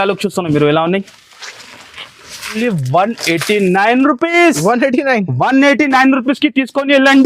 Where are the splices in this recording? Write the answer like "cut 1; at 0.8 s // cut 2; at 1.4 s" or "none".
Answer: cut 1; at 2.6 s